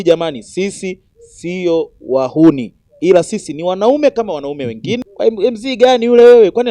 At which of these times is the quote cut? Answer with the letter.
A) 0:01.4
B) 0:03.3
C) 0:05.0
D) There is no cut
C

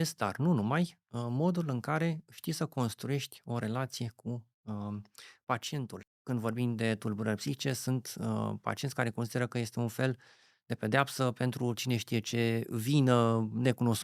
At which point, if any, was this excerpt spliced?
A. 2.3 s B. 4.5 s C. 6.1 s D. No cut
C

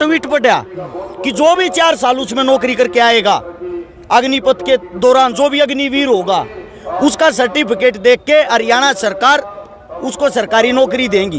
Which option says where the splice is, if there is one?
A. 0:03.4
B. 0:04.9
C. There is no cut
C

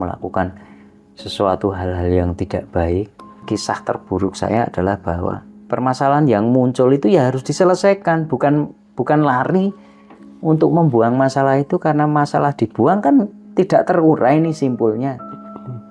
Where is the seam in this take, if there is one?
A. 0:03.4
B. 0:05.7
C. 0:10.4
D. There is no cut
A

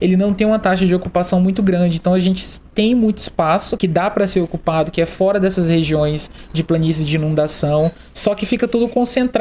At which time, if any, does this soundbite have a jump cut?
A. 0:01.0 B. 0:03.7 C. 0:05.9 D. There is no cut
B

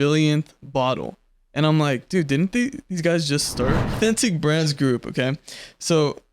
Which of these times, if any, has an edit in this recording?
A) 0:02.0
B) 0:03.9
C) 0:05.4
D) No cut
B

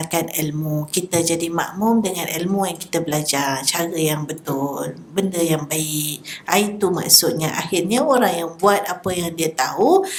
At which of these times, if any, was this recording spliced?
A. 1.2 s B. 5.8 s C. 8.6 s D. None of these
D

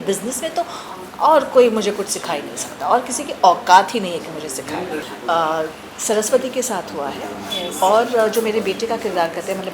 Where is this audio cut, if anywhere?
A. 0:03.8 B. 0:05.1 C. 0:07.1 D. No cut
B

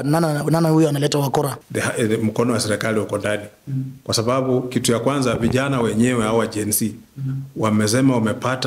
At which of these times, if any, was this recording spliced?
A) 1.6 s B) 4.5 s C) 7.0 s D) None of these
A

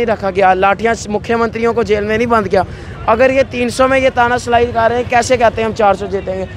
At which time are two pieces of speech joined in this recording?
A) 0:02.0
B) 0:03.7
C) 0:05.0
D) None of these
D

